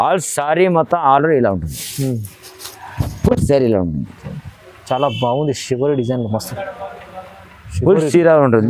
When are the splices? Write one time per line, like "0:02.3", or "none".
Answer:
none